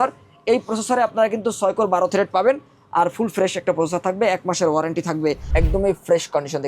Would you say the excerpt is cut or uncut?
cut